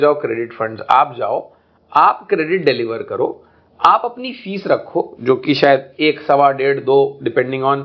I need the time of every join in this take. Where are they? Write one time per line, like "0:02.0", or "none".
none